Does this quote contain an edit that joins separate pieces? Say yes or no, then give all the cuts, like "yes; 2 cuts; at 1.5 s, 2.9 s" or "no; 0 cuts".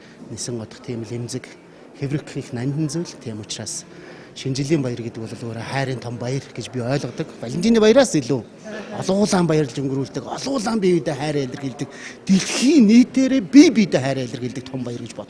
yes; 1 cut; at 8.5 s